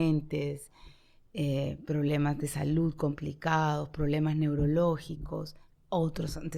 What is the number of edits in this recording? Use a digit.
0